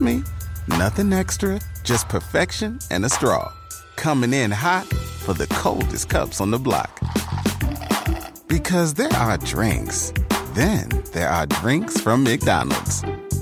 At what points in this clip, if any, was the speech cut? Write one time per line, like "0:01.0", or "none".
none